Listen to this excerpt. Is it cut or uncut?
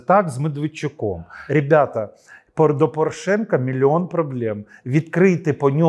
cut